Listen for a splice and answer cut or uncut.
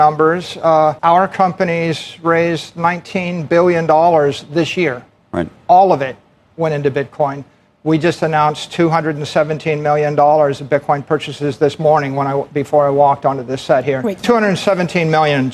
cut